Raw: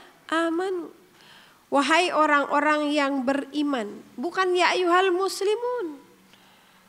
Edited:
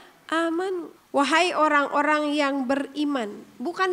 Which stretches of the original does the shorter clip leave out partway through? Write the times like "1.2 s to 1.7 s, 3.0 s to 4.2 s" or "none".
0.9 s to 1.5 s